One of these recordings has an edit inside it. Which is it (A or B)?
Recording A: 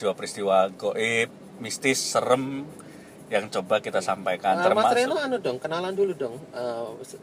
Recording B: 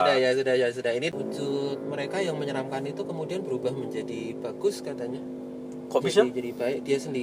B